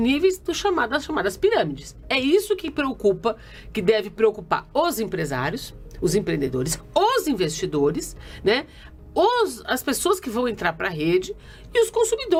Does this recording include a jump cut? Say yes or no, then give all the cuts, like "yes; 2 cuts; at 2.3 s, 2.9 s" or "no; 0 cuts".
no; 0 cuts